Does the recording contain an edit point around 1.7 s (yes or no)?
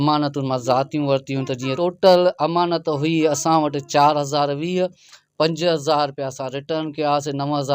yes